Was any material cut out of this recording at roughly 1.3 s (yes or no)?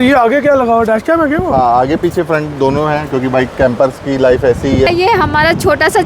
no